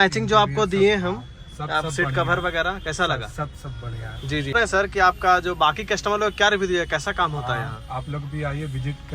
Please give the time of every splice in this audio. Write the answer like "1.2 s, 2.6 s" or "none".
4.5 s